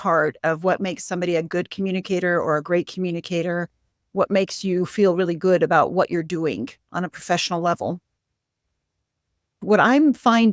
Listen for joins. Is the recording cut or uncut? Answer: cut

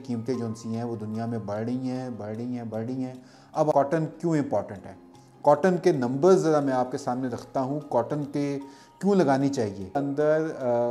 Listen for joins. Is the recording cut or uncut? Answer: cut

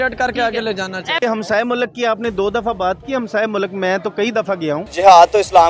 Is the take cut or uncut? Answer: cut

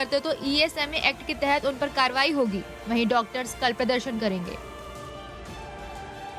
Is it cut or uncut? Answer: cut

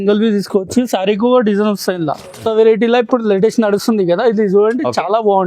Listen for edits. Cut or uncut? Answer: cut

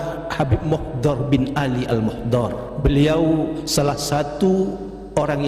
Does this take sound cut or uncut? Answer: cut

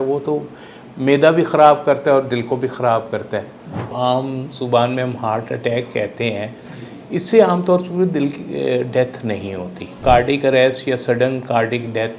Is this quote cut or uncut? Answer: cut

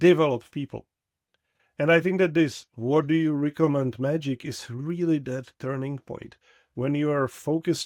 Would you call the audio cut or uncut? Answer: uncut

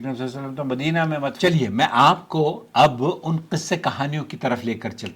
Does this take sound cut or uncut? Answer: cut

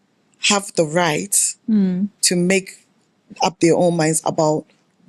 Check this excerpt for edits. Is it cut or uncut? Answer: uncut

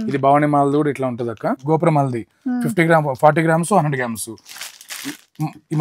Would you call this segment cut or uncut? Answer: cut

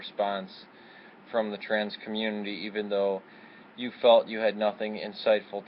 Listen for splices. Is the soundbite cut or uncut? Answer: cut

